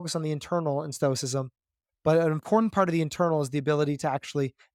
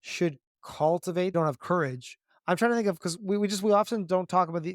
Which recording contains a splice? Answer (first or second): second